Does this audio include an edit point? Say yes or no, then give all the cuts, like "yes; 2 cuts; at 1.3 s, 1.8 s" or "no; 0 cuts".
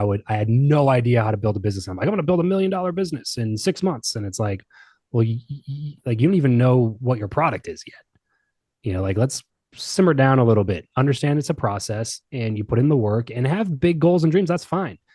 no; 0 cuts